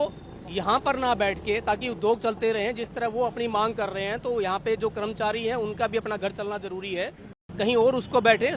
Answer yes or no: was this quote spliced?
yes